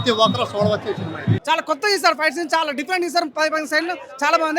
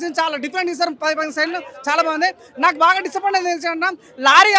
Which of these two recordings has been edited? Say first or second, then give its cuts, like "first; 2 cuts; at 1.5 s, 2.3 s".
first; 1 cut; at 1.4 s